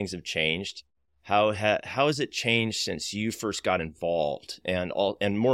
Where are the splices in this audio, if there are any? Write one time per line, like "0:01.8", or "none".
none